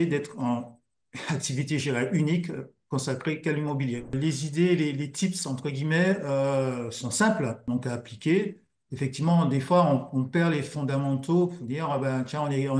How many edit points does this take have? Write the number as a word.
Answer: two